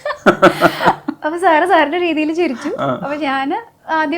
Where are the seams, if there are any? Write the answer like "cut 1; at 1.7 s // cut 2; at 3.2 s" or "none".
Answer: none

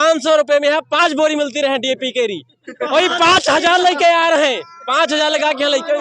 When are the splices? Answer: none

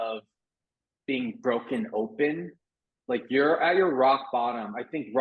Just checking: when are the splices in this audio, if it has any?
none

